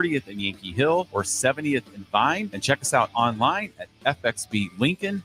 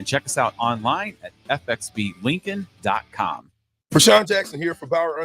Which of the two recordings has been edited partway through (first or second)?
second